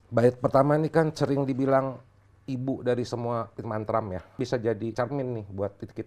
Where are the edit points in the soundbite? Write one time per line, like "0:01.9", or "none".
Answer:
0:04.3